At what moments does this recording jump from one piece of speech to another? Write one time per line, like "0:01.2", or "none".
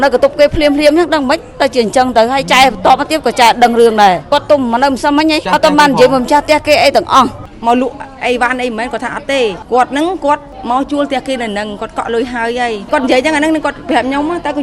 0:04.2
0:05.4
0:07.5
0:09.6
0:10.5
0:12.8